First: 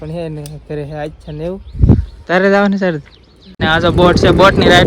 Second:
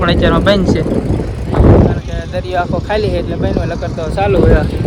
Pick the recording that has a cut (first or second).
first